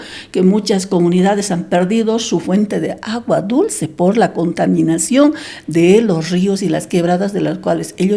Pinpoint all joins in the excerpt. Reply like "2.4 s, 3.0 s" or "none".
none

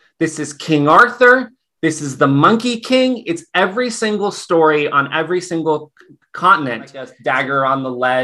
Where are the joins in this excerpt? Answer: 7.1 s

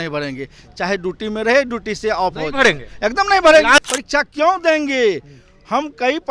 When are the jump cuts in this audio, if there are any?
3.8 s

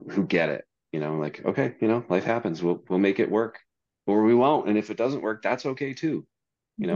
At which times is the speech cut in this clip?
none

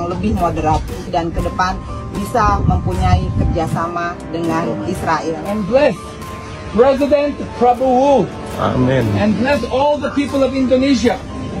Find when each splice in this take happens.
1.1 s

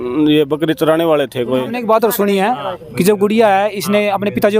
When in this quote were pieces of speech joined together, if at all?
1.8 s

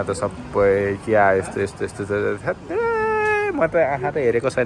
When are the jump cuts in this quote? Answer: none

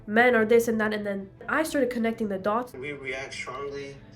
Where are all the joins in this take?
1.4 s, 2.7 s

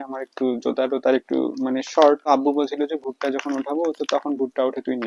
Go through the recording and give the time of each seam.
2.2 s

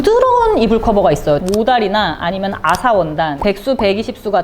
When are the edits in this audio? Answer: 1.4 s

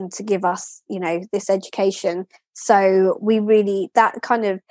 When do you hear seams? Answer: none

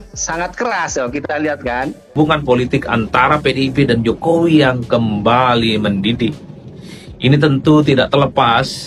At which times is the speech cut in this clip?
none

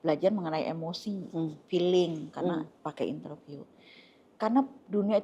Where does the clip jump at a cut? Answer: none

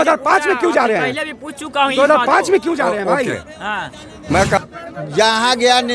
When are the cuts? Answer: 4.6 s

